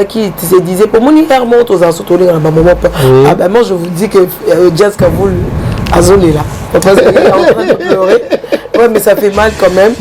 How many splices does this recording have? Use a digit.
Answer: 0